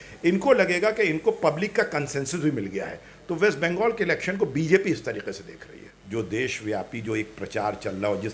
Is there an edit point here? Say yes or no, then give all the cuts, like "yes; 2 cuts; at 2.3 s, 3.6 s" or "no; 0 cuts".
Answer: yes; 1 cut; at 6.0 s